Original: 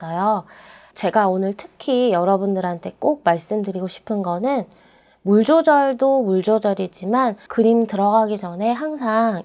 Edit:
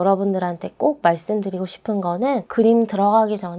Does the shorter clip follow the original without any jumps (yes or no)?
no